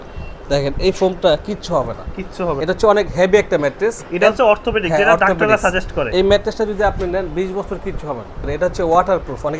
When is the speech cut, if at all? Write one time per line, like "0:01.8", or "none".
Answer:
0:02.6
0:06.0
0:08.5